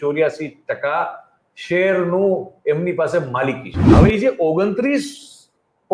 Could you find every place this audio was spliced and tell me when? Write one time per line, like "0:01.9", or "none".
0:03.7